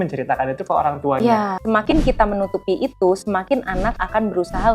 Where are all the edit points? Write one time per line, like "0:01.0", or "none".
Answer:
0:01.6